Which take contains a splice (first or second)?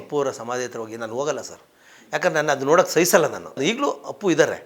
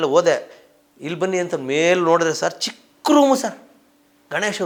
first